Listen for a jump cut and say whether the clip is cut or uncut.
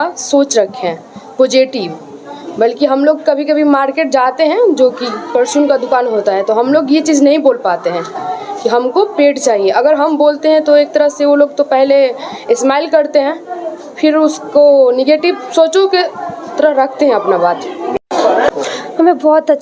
cut